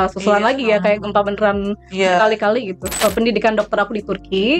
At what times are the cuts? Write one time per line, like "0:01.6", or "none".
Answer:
0:02.9